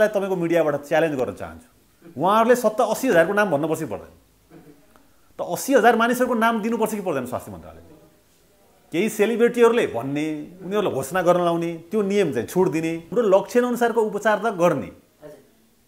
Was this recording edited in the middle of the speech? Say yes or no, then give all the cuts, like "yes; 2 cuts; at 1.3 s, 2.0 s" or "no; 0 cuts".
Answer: yes; 1 cut; at 13.0 s